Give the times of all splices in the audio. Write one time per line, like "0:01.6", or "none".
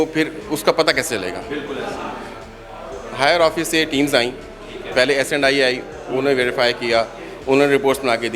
none